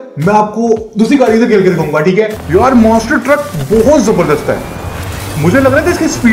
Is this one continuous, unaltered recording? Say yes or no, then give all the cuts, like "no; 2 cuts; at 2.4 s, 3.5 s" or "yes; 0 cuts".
no; 1 cut; at 2.4 s